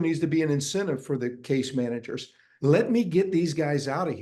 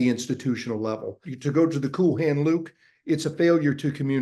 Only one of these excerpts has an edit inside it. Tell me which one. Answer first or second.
first